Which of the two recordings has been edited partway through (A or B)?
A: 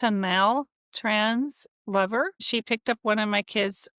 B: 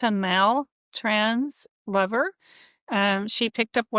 A